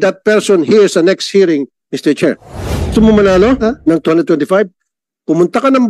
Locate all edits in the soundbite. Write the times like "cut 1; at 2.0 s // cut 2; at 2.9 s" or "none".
cut 1; at 2.9 s